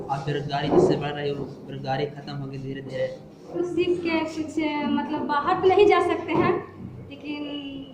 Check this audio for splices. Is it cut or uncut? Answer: cut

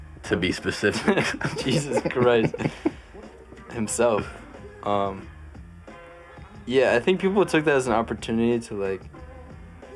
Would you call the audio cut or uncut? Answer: uncut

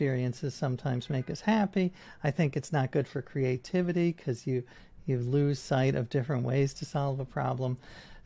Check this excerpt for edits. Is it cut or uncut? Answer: uncut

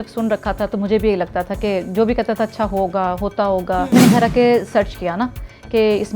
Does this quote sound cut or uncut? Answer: cut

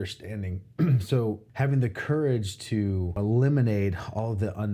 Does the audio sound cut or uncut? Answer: cut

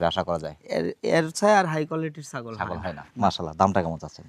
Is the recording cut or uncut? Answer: uncut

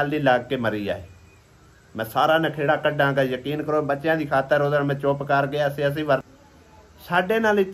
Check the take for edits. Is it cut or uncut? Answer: cut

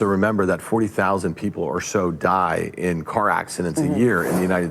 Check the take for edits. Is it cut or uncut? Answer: uncut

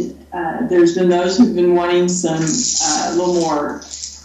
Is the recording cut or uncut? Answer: uncut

